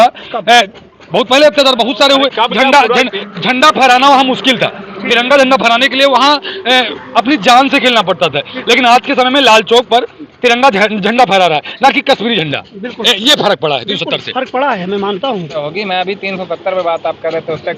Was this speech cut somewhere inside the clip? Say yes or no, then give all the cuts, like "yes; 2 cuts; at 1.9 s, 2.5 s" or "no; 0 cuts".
yes; 1 cut; at 15.6 s